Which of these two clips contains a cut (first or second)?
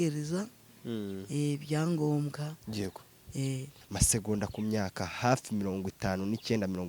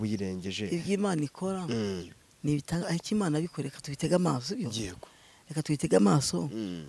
first